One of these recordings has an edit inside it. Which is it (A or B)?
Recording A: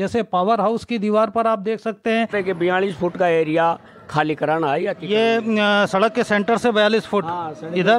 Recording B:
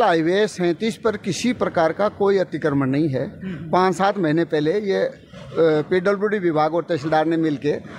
A